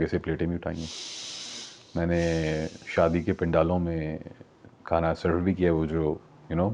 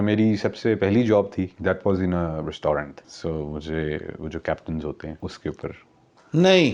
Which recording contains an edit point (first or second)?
second